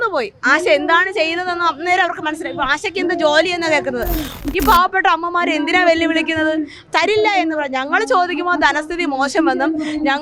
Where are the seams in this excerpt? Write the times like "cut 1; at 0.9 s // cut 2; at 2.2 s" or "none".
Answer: cut 1; at 4.4 s